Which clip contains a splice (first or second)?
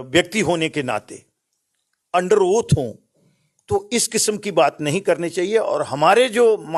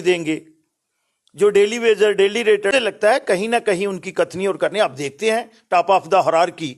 second